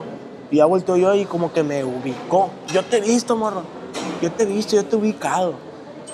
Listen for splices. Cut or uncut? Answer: uncut